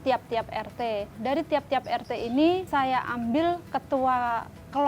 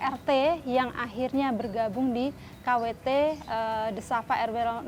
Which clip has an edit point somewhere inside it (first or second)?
first